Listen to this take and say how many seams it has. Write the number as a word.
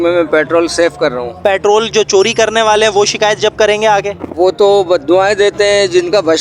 one